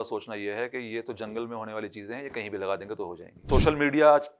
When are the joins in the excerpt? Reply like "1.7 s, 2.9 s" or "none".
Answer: 3.4 s